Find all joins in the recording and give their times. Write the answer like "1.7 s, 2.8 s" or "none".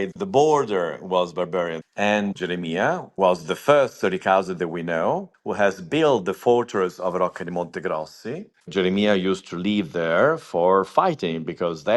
2.2 s, 5.4 s, 8.7 s